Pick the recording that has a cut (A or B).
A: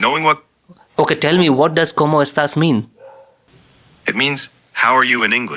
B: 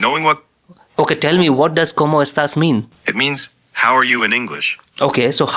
B